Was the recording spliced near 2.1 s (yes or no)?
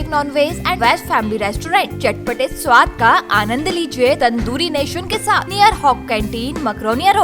no